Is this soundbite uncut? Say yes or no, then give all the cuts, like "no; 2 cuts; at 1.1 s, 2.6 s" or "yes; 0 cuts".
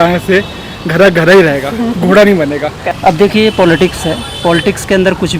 no; 1 cut; at 2.9 s